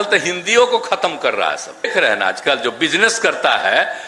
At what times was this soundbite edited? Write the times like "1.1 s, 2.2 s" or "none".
1.9 s